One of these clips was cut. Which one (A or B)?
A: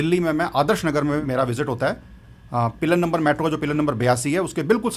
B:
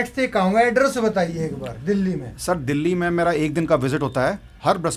A